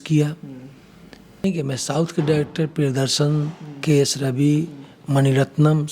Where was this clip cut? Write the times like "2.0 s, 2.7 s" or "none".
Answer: 1.4 s